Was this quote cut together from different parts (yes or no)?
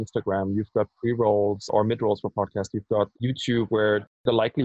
yes